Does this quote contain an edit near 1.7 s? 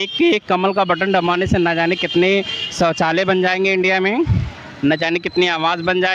no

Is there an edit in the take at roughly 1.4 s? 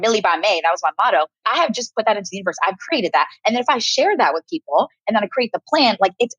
yes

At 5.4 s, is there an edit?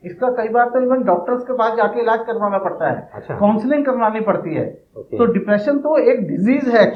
no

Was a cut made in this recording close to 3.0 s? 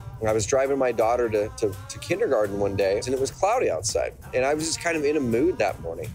yes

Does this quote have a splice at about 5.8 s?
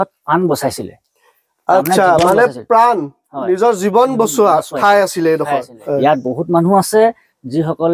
yes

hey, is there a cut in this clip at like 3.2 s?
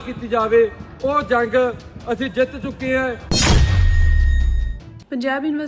yes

